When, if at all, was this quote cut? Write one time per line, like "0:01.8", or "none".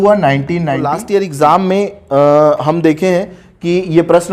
0:01.0